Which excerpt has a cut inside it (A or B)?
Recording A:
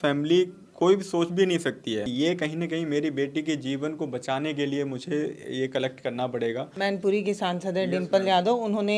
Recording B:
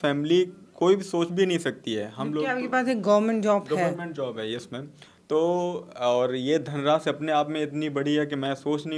A